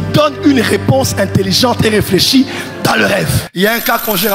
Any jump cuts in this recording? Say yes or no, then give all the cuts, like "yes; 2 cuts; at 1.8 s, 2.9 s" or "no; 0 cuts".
yes; 1 cut; at 3.4 s